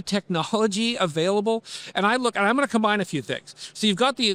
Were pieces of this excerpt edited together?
no; 0 cuts

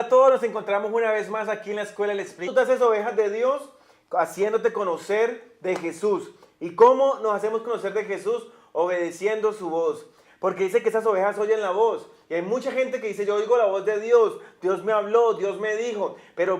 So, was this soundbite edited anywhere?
no; 0 cuts

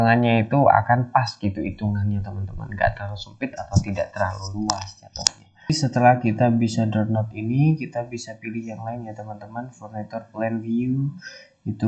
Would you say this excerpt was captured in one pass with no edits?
no; 1 cut; at 5.7 s

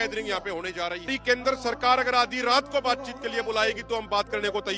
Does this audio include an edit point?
yes; 1 cut; at 1.1 s

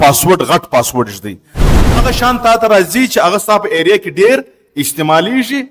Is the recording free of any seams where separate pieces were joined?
no; 1 cut; at 1.7 s

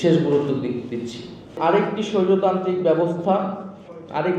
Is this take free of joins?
no; 1 cut; at 1.6 s

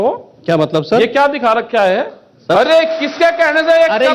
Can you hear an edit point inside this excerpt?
yes; 1 cut; at 2.5 s

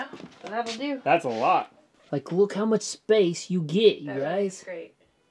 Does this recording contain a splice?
yes; 1 cut; at 1.9 s

